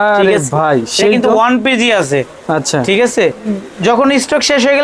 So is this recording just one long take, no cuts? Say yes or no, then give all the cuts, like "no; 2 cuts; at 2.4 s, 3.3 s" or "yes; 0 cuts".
no; 1 cut; at 3.4 s